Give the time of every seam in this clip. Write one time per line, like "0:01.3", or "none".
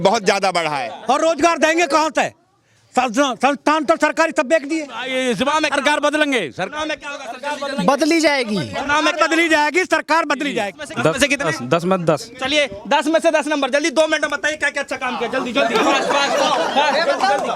0:00.9
0:05.0
0:10.8